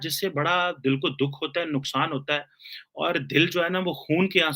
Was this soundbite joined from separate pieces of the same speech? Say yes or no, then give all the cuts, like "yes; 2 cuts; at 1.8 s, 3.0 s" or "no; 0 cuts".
no; 0 cuts